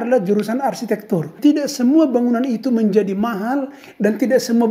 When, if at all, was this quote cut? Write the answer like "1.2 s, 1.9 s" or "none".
1.3 s

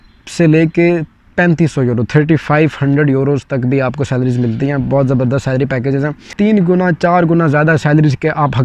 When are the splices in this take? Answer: 6.4 s

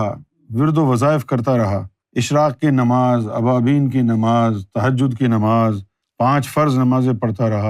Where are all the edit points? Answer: none

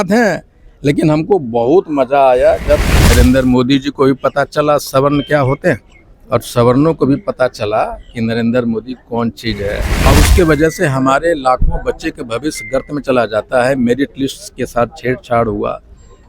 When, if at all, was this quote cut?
2.9 s, 9.9 s

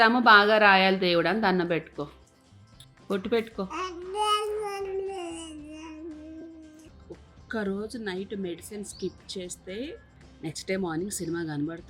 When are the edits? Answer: 6.8 s

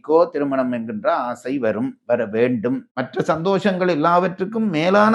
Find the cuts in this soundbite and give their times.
2.9 s

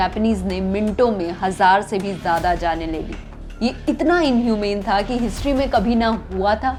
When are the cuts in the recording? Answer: none

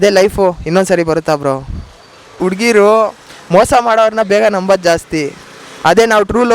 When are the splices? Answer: 2.3 s

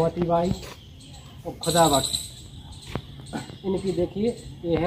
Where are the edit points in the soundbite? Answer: none

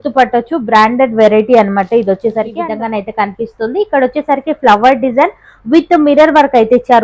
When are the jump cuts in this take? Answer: 2.6 s

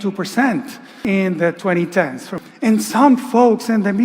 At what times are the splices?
0.9 s, 2.3 s

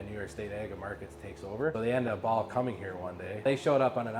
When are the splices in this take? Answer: 1.7 s, 3.4 s

